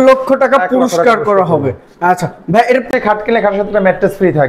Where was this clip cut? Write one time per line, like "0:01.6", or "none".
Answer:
0:02.9

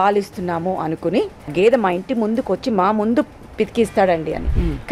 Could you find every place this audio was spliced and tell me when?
0:01.5

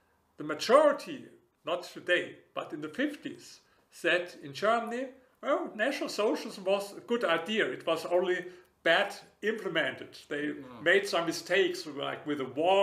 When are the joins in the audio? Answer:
none

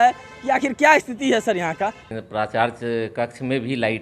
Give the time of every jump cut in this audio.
0:02.1

